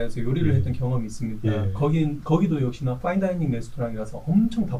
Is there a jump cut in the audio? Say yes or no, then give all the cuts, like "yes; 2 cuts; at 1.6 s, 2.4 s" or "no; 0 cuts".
no; 0 cuts